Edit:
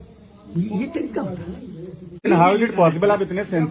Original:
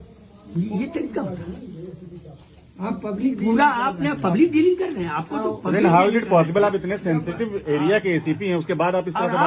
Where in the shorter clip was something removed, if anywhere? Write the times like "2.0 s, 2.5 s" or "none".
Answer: 2.3 s